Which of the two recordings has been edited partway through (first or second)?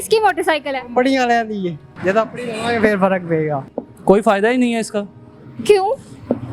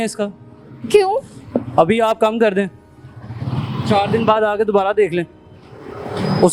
first